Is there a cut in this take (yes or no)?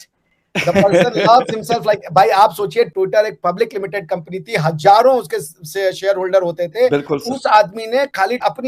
no